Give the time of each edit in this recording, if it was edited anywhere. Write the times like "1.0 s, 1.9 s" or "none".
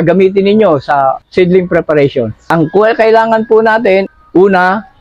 1.2 s, 2.4 s, 4.1 s